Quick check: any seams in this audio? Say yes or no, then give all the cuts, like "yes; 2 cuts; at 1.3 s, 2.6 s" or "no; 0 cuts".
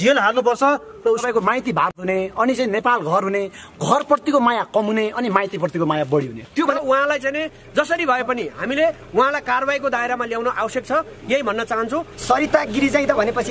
yes; 3 cuts; at 1.2 s, 6.8 s, 12.1 s